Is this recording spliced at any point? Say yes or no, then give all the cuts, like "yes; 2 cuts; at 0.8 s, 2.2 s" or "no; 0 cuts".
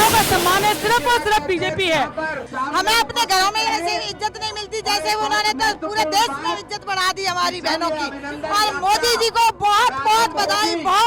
yes; 1 cut; at 2.4 s